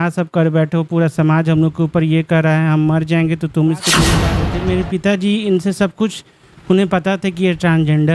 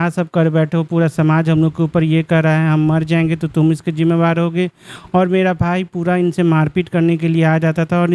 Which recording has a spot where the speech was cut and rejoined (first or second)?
first